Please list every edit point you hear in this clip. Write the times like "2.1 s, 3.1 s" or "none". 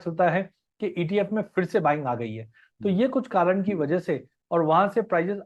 4.3 s